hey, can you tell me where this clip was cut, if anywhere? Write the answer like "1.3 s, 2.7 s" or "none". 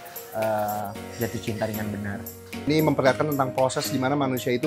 2.7 s